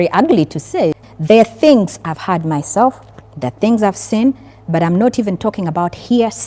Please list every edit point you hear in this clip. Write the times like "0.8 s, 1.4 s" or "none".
1.0 s